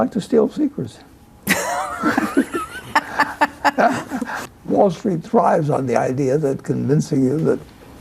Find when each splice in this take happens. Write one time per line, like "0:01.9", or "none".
0:04.3